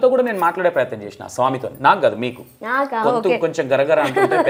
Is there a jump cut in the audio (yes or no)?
no